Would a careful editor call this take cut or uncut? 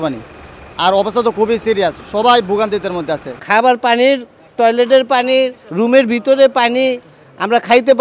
cut